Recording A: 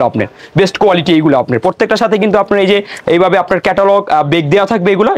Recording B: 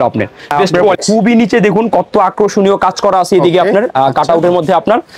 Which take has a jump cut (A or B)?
B